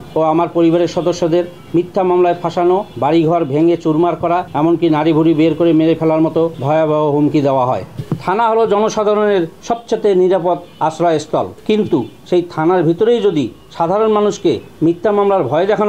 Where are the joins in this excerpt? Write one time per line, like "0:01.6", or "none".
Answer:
0:02.9
0:04.5
0:06.6
0:07.9

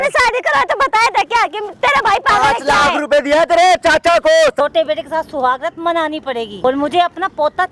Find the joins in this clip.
0:04.6
0:06.5

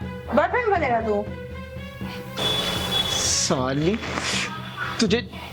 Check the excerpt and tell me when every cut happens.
0:02.4

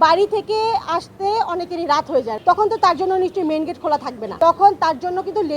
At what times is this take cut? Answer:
0:02.3
0:04.2

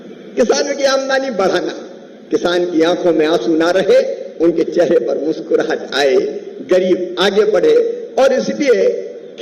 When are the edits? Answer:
none

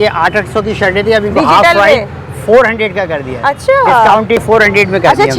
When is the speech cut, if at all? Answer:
0:04.4

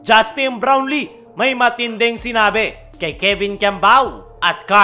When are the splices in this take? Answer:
none

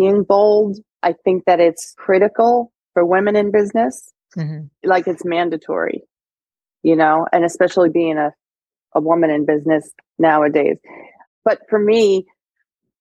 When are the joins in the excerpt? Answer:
0:00.9
0:01.9
0:04.8
0:07.9
0:11.3

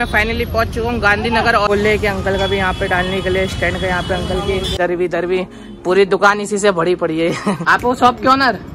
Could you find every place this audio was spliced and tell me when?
0:01.7
0:04.8
0:07.6

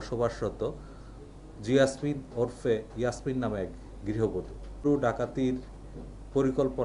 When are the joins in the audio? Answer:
0:04.8

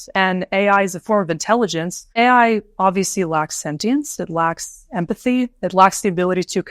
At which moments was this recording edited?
0:02.1

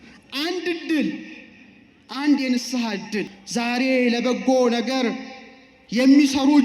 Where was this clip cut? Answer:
0:03.4

